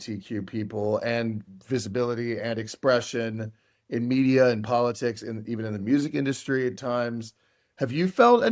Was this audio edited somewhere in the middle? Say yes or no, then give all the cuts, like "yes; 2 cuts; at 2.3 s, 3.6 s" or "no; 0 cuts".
no; 0 cuts